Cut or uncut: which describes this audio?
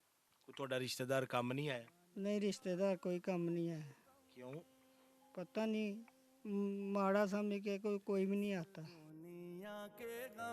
cut